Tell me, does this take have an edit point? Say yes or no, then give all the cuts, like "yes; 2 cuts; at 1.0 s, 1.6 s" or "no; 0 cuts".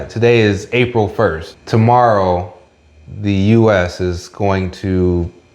yes; 1 cut; at 1.5 s